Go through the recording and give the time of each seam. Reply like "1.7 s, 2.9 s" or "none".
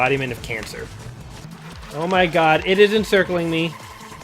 1.3 s